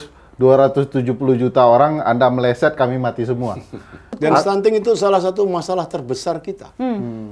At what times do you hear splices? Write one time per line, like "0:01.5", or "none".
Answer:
0:04.1